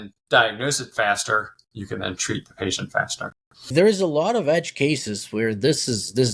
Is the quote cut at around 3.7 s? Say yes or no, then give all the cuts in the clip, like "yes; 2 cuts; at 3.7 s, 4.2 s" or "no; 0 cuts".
yes; 1 cut; at 3.7 s